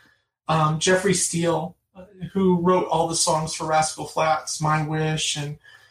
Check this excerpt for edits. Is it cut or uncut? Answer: uncut